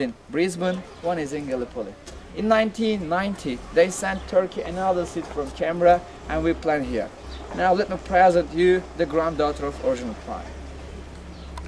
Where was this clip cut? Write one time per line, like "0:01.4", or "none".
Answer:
none